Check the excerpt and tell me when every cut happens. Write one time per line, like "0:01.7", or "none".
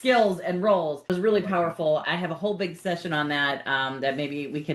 0:01.0